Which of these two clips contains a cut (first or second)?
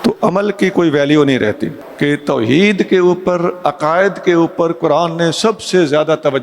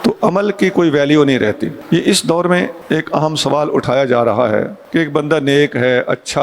first